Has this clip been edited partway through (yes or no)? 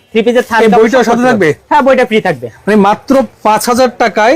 yes